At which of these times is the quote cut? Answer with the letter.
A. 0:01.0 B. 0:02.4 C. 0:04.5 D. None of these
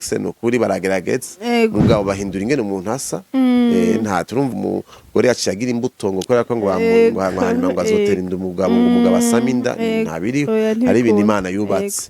C